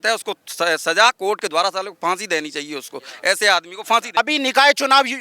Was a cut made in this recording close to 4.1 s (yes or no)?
yes